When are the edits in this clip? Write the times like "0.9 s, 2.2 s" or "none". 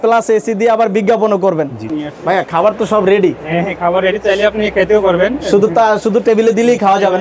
1.8 s